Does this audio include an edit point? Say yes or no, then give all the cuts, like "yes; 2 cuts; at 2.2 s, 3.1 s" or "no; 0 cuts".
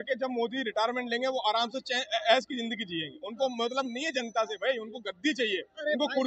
no; 0 cuts